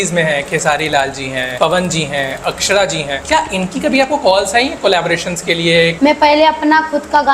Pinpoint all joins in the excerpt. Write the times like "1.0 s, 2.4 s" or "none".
1.5 s, 3.2 s, 5.9 s